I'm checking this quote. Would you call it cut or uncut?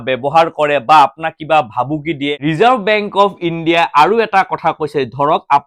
cut